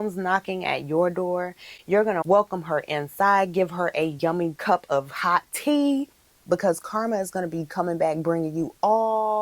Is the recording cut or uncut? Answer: cut